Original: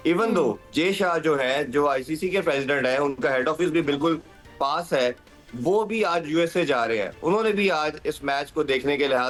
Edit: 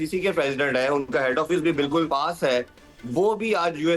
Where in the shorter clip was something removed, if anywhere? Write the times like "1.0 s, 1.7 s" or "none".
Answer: 2.1 s

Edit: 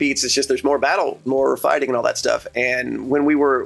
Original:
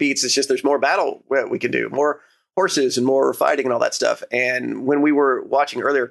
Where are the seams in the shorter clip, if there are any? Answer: 1.3 s

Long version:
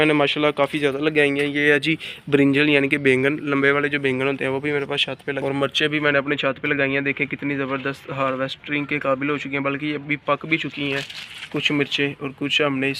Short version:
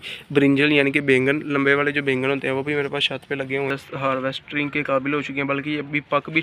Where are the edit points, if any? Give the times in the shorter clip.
3.5 s

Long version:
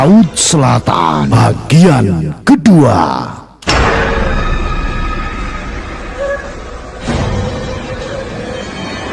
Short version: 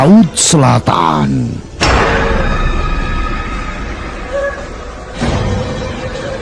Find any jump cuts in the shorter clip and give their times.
1.4 s

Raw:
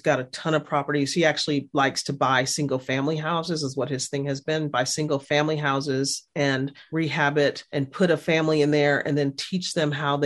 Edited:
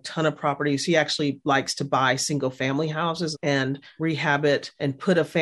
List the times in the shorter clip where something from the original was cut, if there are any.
3.3 s

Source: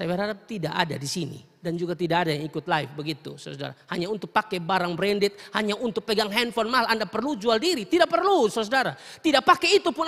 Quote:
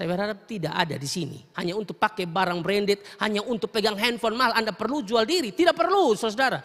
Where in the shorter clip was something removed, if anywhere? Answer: 1.4 s

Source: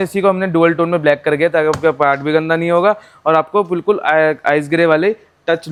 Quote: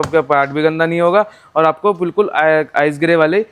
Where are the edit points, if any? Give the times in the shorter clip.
none

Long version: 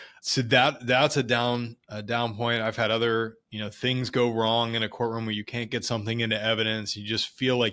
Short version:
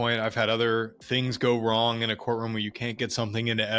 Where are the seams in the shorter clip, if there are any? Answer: 1.0 s

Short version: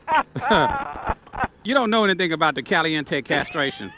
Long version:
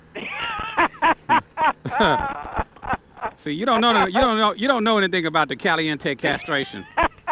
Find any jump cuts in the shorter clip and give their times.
1.6 s

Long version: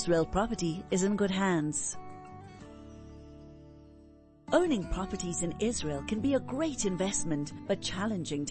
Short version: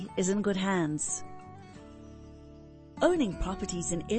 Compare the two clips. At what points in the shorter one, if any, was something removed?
1.0 s, 2.9 s

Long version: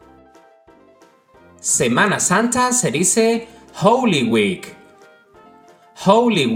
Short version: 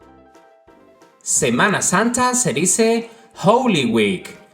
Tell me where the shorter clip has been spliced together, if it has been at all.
1.3 s

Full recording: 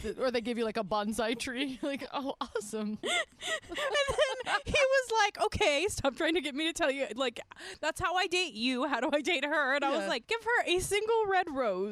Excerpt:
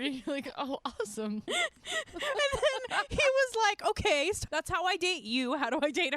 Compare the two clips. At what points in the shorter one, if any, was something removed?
4.4 s

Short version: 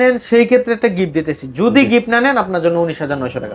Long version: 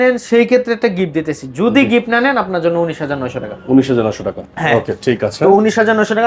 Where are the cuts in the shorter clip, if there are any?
none

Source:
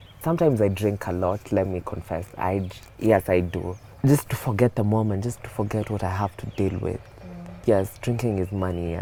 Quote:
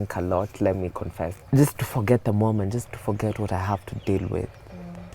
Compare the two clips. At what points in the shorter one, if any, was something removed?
1.3 s

